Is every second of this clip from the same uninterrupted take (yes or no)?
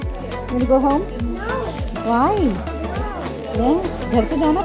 yes